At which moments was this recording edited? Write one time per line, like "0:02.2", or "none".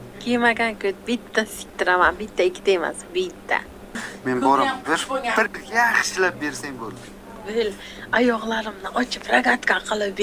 0:04.1